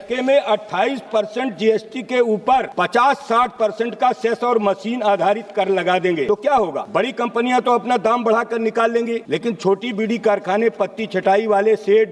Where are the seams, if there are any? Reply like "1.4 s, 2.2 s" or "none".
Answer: 2.7 s, 6.5 s, 9.2 s